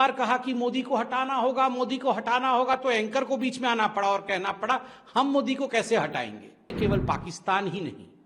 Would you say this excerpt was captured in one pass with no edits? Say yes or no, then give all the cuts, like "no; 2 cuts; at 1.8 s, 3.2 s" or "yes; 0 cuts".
no; 1 cut; at 6.7 s